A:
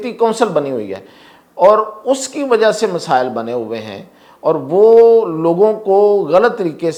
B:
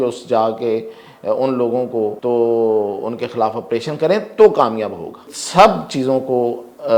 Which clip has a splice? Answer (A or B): B